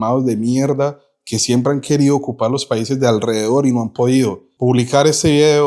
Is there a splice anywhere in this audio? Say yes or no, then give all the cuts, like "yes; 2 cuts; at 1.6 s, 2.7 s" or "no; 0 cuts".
yes; 1 cut; at 4.5 s